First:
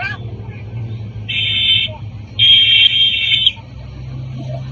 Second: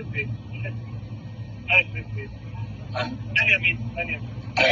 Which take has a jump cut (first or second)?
second